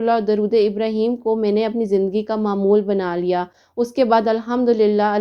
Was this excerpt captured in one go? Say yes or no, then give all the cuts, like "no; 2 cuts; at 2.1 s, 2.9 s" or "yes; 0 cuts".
yes; 0 cuts